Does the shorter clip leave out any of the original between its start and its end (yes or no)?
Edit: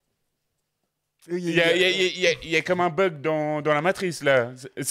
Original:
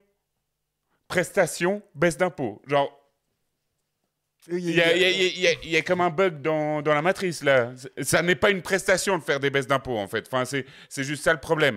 no